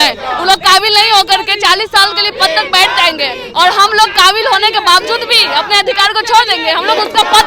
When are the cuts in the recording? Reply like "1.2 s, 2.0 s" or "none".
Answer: none